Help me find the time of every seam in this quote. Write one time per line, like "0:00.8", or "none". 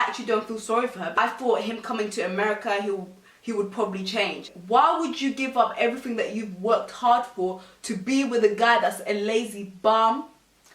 0:01.2
0:04.5